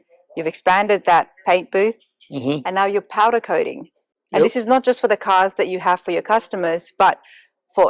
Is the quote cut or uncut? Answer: uncut